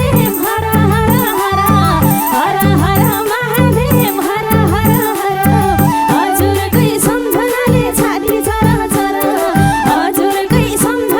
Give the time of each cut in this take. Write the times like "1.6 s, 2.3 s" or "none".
none